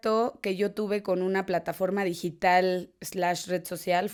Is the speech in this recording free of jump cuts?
yes; 0 cuts

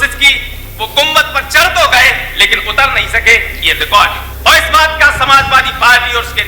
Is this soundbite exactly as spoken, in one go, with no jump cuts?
no; 1 cut; at 4.3 s

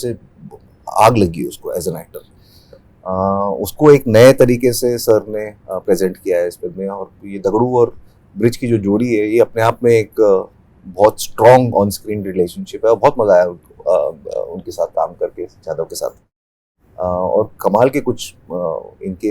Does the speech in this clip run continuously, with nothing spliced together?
yes; 0 cuts

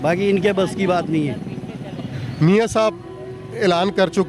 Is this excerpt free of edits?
no; 1 cut; at 2.2 s

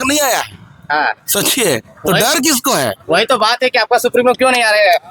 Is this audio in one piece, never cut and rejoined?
yes; 0 cuts

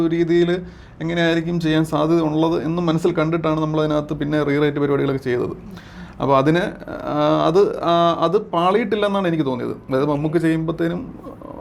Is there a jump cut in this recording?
no; 0 cuts

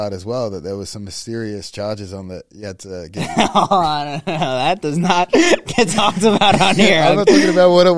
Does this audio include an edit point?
no; 0 cuts

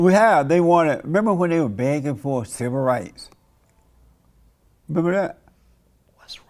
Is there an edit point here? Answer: no; 0 cuts

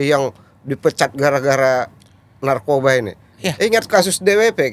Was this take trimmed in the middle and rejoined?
no; 0 cuts

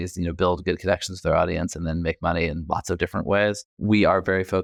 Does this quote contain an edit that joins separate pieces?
no; 0 cuts

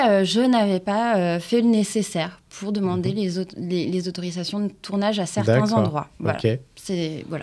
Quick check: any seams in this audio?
no; 0 cuts

